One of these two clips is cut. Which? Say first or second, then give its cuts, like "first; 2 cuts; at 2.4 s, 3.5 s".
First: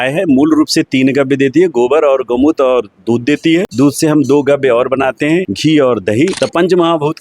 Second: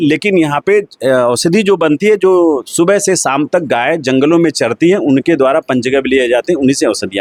first; 3 cuts; at 3.7 s, 5.5 s, 6.3 s